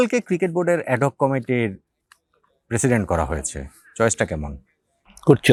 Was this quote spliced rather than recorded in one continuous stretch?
no; 0 cuts

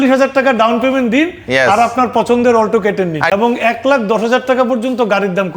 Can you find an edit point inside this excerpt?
yes; 1 cut; at 3.3 s

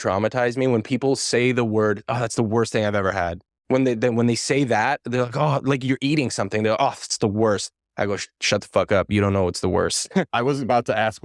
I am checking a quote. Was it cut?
yes; 1 cut; at 10.3 s

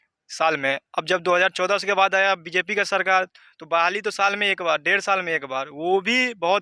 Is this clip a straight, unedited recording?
yes; 0 cuts

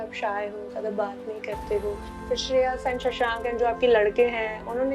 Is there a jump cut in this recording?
no; 0 cuts

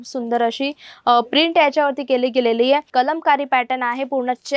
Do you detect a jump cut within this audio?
yes; 1 cut; at 2.9 s

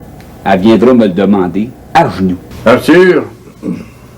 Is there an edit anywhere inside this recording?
yes; 1 cut; at 2.5 s

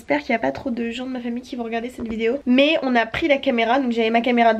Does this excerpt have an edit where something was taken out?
no; 0 cuts

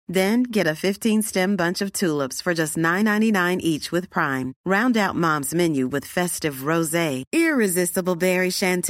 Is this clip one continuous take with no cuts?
yes; 0 cuts

